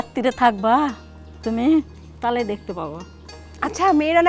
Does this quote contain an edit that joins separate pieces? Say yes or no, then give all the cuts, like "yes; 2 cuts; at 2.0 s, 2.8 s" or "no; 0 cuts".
no; 0 cuts